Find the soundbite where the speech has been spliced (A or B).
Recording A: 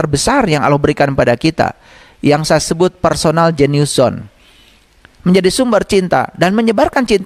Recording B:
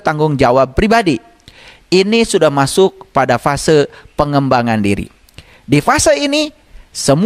A